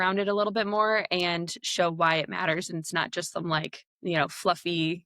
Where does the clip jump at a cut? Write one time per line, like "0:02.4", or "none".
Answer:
0:03.8